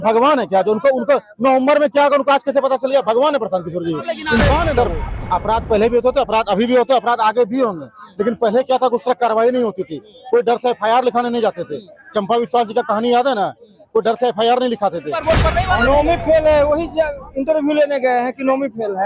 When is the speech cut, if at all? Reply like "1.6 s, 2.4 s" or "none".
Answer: 4.7 s, 15.2 s